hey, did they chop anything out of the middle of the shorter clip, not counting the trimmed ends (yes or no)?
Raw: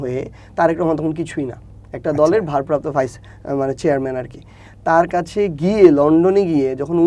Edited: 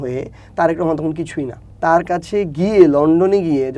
yes